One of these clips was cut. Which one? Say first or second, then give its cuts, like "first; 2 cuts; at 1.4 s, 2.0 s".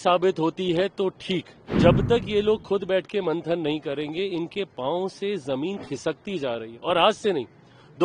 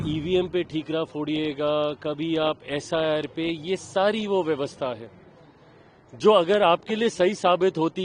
first; 1 cut; at 1.6 s